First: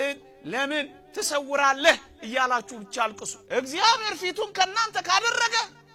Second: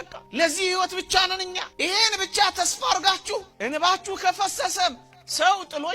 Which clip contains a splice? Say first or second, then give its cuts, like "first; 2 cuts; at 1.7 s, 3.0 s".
second; 1 cut; at 3.5 s